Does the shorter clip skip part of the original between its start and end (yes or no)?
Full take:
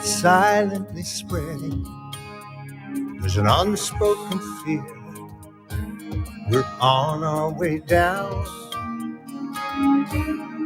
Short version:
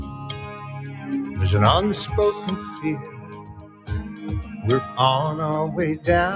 no